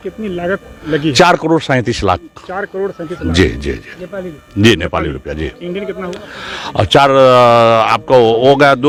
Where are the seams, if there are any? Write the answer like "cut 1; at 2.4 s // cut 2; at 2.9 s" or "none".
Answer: none

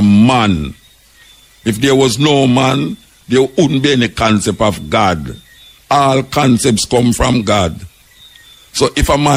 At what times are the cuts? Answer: none

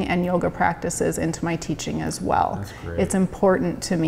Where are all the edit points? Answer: none

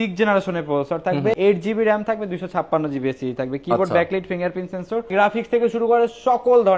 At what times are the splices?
cut 1; at 1.4 s // cut 2; at 5.1 s

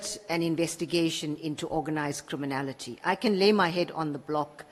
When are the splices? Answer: none

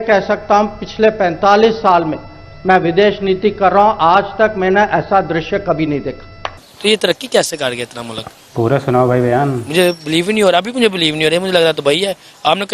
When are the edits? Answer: cut 1; at 6.6 s

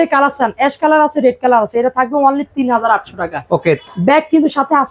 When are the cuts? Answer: none

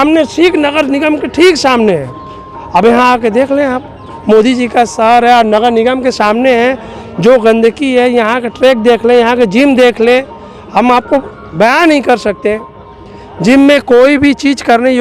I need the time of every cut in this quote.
none

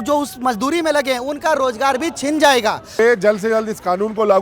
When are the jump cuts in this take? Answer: cut 1; at 3.0 s

